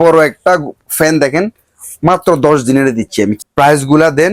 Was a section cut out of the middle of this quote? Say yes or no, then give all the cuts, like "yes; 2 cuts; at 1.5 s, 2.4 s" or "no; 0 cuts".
yes; 1 cut; at 3.3 s